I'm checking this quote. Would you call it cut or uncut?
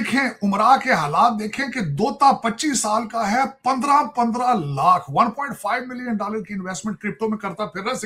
uncut